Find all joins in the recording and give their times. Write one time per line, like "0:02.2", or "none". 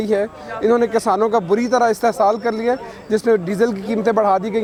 none